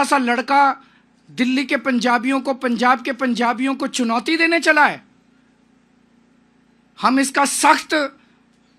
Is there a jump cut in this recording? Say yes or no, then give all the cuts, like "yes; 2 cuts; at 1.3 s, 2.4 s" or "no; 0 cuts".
no; 0 cuts